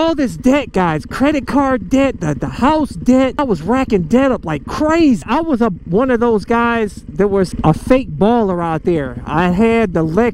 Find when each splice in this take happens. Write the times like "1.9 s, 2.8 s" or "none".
3.4 s, 5.2 s, 7.5 s